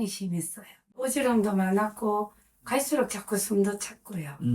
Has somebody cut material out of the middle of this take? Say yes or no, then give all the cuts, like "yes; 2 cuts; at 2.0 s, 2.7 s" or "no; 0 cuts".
yes; 1 cut; at 1.1 s